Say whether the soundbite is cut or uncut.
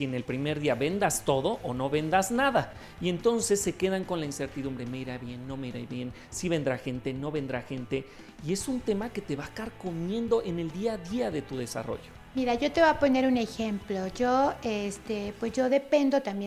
uncut